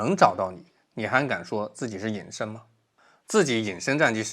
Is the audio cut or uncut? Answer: cut